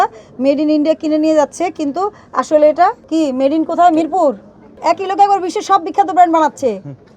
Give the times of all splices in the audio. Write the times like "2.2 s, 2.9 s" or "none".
3.0 s, 4.7 s